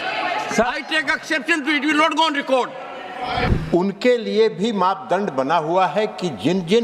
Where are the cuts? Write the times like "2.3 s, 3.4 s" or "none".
3.5 s